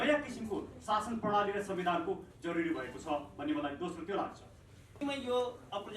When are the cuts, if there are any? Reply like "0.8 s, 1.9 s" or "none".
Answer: 5.0 s

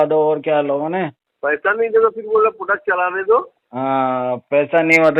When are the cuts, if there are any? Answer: 1.2 s

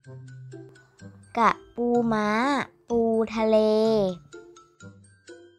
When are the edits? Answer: 1.0 s, 4.6 s

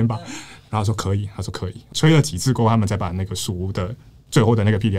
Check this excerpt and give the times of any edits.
1.9 s

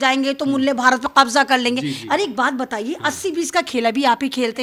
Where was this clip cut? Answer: none

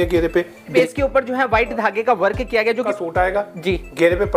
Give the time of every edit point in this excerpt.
0.7 s, 2.8 s

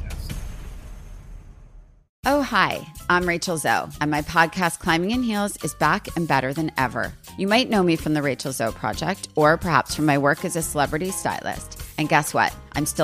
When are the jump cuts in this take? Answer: 2.0 s

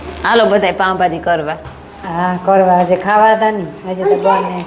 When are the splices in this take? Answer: none

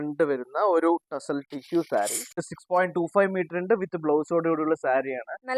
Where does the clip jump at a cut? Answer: 2.5 s

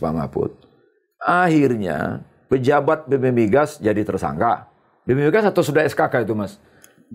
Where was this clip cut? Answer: none

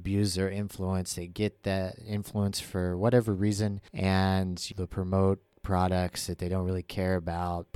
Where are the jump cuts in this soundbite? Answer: 3.8 s, 4.7 s

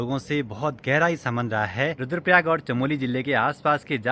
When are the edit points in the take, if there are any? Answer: none

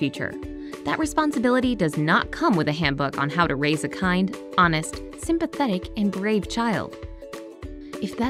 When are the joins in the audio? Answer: none

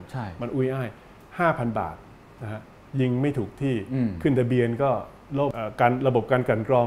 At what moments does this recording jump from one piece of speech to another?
5.6 s

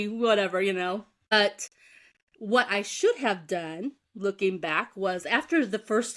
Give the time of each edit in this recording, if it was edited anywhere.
1.3 s

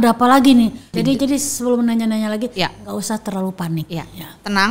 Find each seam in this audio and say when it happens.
0.9 s

